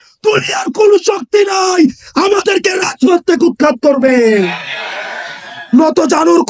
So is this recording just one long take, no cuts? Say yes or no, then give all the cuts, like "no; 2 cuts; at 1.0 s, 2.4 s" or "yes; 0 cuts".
no; 1 cut; at 5.5 s